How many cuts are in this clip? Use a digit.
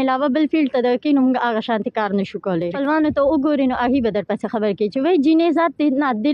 1